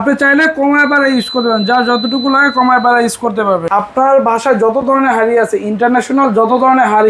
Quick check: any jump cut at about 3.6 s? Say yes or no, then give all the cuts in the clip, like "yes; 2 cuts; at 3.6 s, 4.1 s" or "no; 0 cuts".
yes; 1 cut; at 3.6 s